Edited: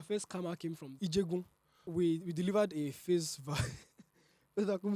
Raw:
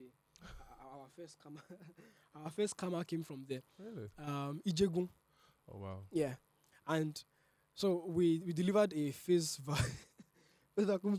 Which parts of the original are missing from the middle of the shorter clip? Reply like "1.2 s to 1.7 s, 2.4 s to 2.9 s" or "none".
3.4 s to 4.6 s, 5.5 s to 8.1 s